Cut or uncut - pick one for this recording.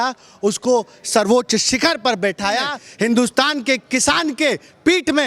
cut